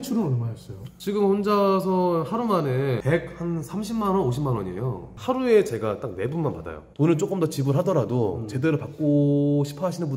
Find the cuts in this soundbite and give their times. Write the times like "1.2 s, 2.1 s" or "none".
3.0 s, 5.1 s, 6.8 s